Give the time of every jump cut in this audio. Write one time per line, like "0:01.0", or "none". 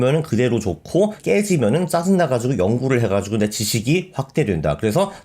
0:01.2